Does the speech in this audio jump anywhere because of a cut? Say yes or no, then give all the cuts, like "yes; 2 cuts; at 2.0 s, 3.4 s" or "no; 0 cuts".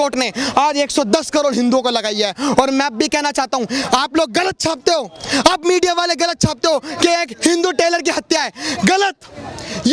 no; 0 cuts